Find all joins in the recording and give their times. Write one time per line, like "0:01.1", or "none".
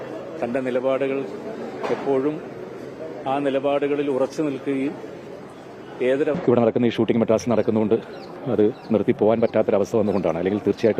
0:06.3